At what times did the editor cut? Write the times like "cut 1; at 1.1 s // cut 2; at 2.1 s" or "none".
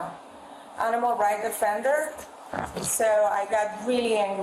none